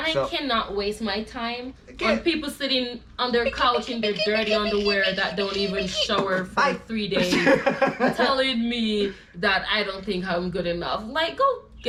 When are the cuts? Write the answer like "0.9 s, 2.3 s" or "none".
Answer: none